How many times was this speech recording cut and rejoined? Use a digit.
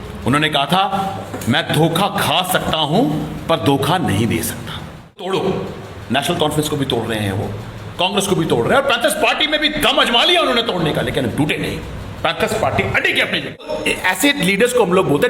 2